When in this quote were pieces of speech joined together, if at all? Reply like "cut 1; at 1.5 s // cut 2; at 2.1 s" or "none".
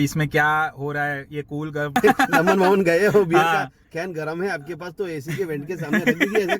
cut 1; at 2.0 s

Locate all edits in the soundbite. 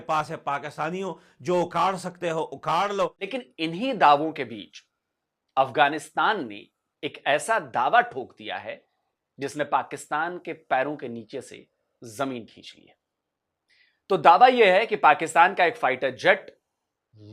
cut 1; at 3.3 s

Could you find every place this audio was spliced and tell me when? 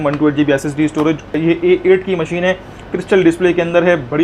cut 1; at 1.4 s

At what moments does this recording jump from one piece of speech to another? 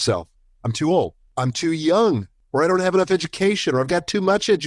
cut 1; at 1.3 s // cut 2; at 2.3 s

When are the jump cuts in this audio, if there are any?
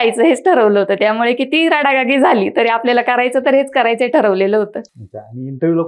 none

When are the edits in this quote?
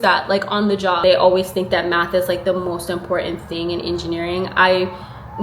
cut 1; at 1.0 s

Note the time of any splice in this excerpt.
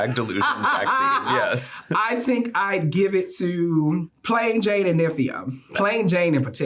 cut 1; at 5.7 s

